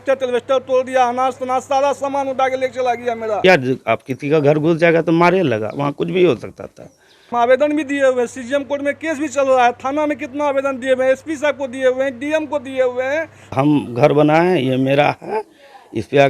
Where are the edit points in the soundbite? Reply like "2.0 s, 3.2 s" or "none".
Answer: 3.4 s, 7.2 s, 13.5 s